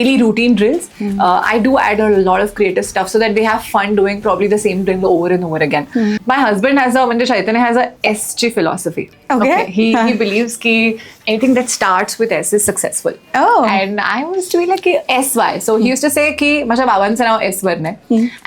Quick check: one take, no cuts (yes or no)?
no